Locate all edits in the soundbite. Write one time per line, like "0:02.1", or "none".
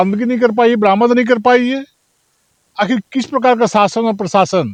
none